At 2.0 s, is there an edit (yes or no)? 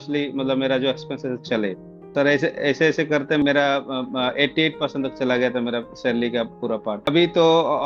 yes